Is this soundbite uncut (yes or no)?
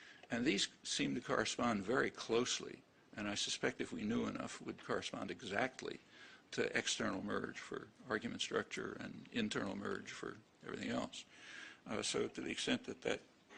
no